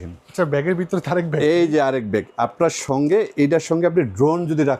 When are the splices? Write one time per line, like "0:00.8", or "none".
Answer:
none